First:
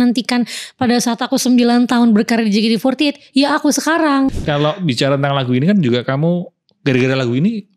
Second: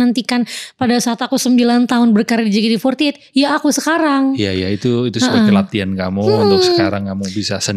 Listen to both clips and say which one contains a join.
first; 1 cut; at 4.3 s

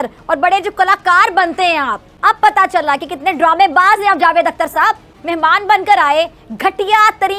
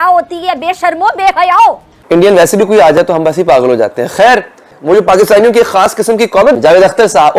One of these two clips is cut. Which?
second; 2 cuts; at 1.9 s, 4.7 s

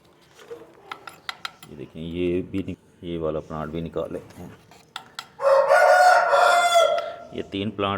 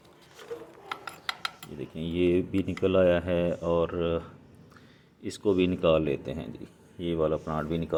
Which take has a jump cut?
first; 1 cut; at 2.7 s

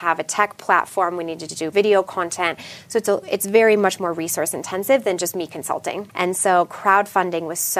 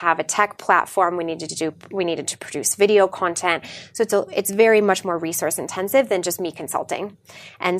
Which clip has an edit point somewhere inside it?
first; 2 cuts; at 1.7 s, 6.1 s

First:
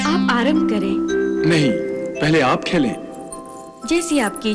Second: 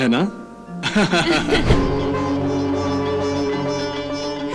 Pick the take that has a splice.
second; 1 cut; at 1.7 s

